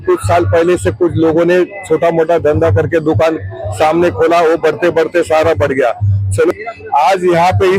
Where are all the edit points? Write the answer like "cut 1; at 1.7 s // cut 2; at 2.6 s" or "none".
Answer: cut 1; at 6.5 s